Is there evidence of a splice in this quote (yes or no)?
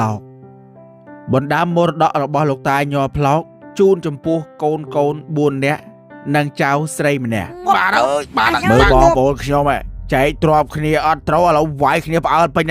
yes